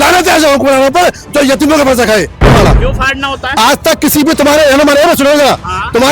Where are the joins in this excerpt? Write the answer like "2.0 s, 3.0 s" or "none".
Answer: 2.5 s